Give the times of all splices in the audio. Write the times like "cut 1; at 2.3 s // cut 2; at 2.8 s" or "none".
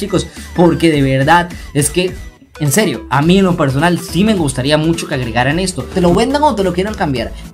cut 1; at 5.9 s